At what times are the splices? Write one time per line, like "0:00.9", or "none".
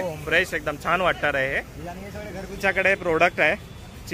0:02.6